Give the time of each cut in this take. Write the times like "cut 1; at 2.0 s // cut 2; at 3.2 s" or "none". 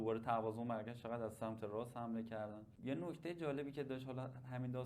none